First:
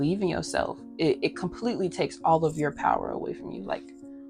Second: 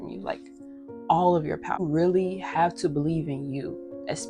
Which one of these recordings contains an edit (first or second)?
second